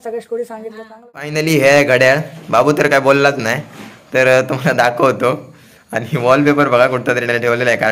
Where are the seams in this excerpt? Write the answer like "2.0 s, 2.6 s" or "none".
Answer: 1.3 s